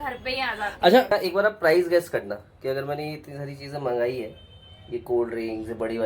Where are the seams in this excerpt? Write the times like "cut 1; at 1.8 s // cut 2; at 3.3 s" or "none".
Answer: cut 1; at 1.1 s